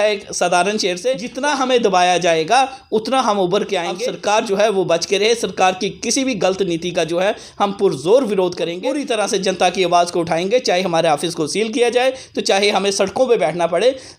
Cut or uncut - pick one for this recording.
cut